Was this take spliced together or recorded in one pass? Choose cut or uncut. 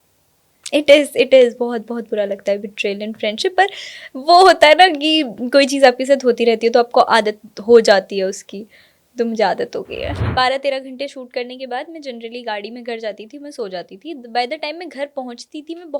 cut